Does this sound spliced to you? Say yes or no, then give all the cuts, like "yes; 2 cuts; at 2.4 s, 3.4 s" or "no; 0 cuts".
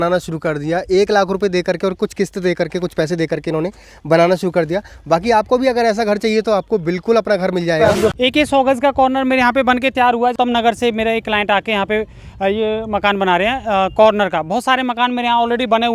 yes; 2 cuts; at 8.1 s, 10.3 s